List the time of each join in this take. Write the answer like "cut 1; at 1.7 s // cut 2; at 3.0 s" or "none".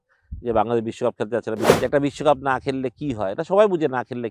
cut 1; at 1.7 s